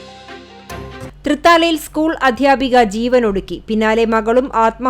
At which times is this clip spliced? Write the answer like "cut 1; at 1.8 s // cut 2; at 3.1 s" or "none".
cut 1; at 1.1 s